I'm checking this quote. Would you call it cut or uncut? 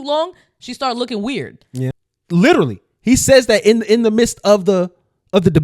cut